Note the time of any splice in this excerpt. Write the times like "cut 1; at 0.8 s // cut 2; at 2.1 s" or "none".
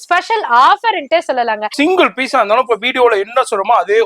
cut 1; at 1.7 s